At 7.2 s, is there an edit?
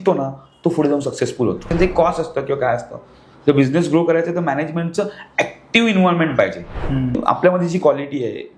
yes; 2 cuts; at 1.7 s, 7.2 s

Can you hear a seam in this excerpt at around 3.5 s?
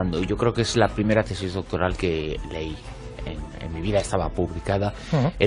yes; 1 cut; at 3.5 s

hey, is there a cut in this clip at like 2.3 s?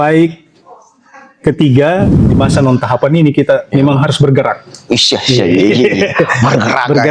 yes; 1 cut; at 2.3 s

